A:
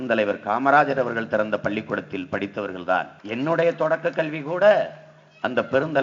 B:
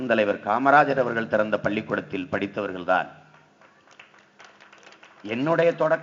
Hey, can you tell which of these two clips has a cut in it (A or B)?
A